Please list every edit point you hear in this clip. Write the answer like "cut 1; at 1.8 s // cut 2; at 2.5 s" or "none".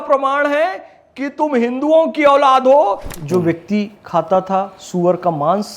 cut 1; at 3.1 s